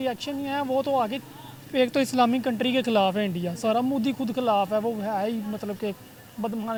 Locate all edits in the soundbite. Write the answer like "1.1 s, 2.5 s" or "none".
none